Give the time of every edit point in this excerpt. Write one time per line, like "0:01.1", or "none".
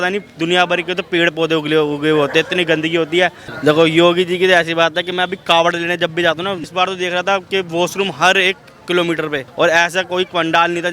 0:03.4
0:06.7
0:09.4